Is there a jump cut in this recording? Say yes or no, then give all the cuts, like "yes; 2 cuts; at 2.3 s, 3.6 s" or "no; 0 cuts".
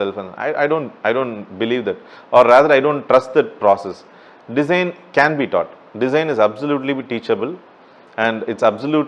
no; 0 cuts